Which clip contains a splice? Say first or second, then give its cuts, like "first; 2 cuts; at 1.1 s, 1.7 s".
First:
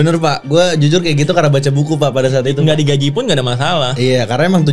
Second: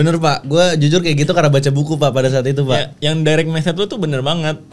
first; 1 cut; at 2.6 s